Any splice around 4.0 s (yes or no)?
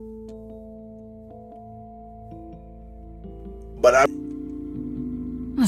yes